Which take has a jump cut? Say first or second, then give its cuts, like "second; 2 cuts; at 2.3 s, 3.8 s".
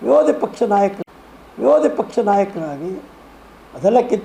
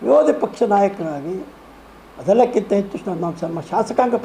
second; 1 cut; at 1.0 s